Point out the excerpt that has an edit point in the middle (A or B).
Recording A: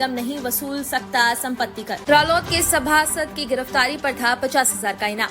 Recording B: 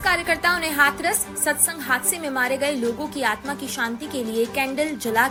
A